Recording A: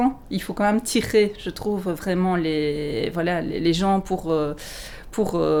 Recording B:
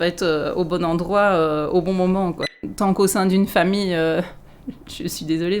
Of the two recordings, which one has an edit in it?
B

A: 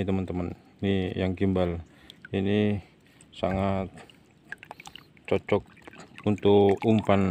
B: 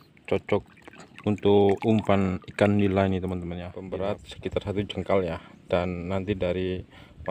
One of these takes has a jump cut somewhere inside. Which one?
B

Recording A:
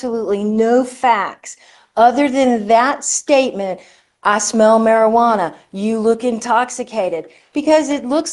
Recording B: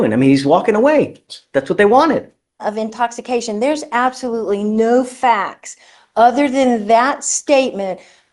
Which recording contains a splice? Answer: B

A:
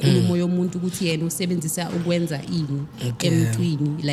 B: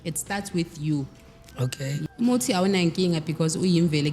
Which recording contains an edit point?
B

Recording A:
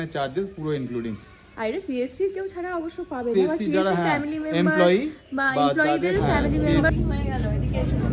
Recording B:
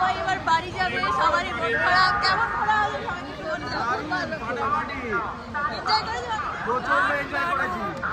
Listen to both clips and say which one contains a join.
A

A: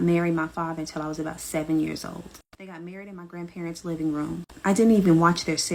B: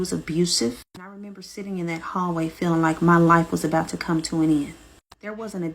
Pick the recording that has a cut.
B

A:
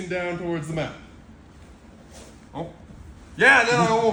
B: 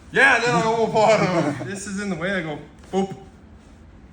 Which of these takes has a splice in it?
B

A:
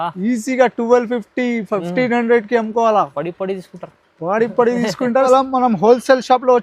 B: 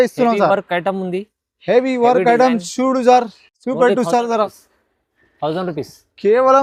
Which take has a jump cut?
A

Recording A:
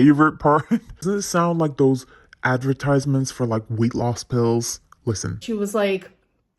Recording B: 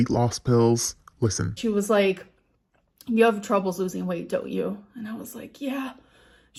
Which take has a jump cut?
A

